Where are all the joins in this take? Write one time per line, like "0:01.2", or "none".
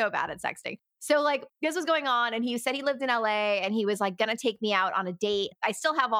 none